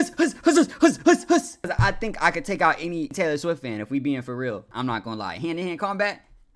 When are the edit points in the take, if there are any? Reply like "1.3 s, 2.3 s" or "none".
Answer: 1.7 s, 3.1 s, 4.7 s